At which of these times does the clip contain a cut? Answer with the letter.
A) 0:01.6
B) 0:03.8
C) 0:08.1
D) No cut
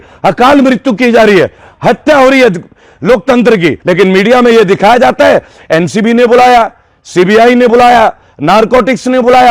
B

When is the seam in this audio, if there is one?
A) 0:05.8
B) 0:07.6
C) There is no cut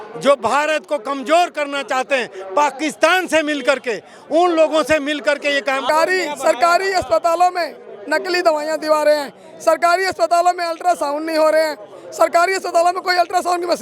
A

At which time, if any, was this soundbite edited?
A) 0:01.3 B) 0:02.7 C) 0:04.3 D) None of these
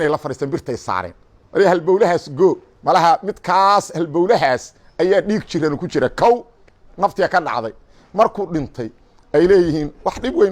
B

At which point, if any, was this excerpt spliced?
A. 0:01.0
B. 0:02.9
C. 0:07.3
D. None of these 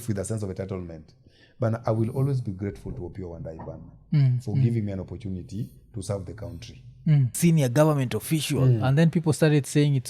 C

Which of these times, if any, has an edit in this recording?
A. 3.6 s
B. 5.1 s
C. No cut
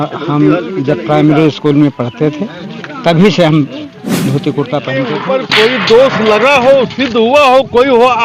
B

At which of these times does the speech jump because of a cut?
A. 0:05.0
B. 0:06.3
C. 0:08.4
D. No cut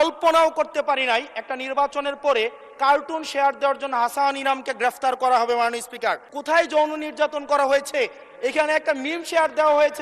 B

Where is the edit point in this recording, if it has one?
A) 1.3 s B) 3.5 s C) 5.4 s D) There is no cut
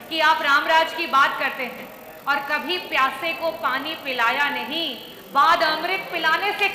D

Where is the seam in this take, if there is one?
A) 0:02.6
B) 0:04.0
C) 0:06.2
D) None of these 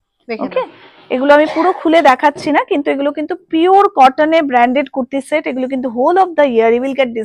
D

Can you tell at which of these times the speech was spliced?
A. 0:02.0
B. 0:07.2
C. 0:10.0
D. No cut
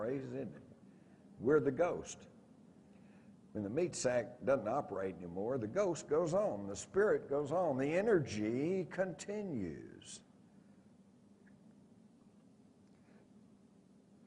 B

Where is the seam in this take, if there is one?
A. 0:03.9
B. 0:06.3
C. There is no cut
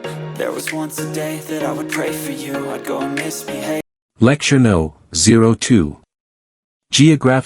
A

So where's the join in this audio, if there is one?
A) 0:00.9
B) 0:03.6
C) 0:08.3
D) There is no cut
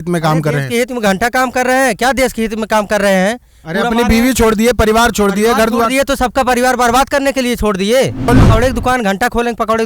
C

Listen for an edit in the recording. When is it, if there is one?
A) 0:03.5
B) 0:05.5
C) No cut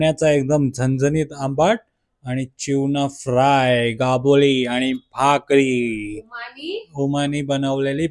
C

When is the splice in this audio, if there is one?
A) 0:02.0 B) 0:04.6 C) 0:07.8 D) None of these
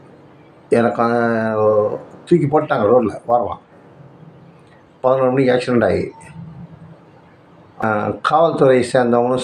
C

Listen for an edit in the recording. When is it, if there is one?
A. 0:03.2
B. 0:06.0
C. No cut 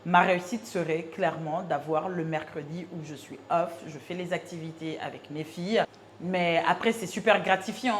B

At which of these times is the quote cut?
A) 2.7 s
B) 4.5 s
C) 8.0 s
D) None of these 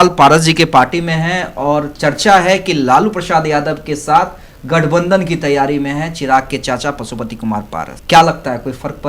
C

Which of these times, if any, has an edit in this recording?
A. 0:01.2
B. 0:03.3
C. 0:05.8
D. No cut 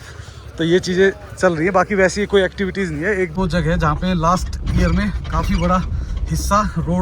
B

